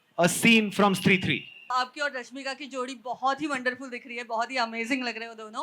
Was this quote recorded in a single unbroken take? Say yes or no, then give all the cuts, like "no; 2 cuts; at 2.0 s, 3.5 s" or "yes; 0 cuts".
no; 1 cut; at 1.7 s